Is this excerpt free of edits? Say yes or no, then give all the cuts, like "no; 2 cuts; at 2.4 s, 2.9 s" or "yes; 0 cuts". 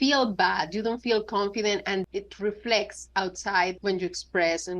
no; 2 cuts; at 2.0 s, 3.8 s